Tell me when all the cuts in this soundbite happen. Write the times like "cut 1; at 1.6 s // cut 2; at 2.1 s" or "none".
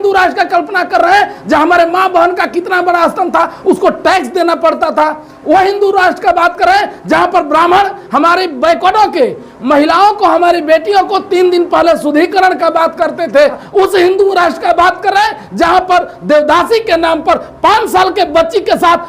cut 1; at 13.6 s